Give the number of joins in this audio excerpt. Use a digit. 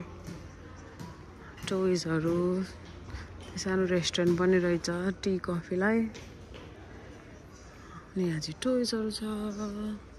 0